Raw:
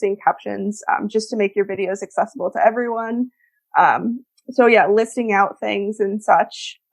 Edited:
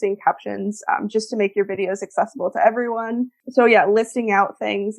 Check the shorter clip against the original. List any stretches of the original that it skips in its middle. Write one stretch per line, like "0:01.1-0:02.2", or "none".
0:03.4-0:04.4